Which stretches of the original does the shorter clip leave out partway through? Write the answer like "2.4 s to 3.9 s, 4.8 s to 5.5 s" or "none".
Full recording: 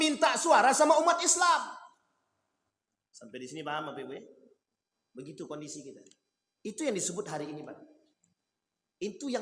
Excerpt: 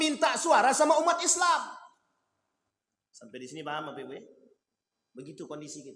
none